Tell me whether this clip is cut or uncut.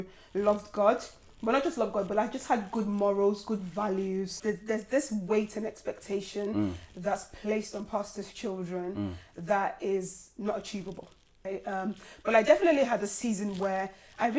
cut